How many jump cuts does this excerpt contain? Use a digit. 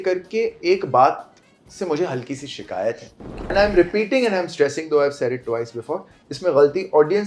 1